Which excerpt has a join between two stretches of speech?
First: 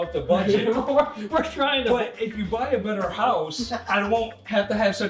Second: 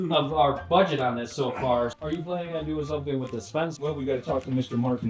second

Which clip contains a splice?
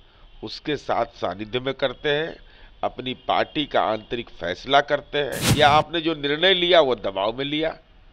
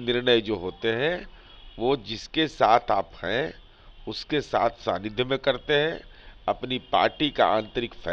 first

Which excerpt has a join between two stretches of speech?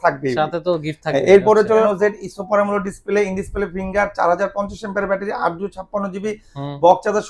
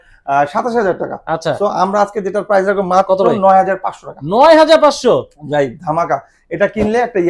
first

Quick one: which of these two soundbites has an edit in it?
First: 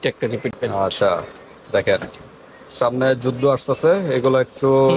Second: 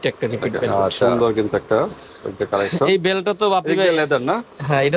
second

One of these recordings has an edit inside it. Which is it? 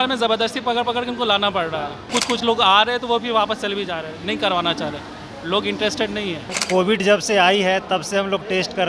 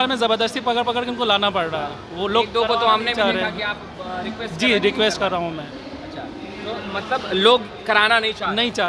first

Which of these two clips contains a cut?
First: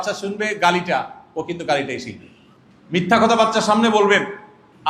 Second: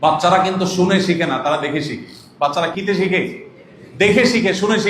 second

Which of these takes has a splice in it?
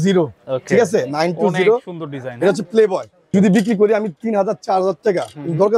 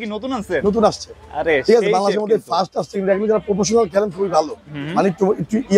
first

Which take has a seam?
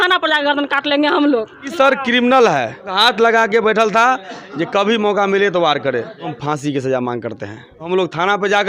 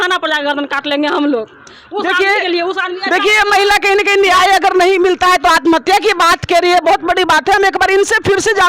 first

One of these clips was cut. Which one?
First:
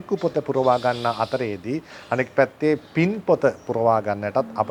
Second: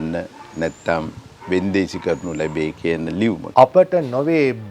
second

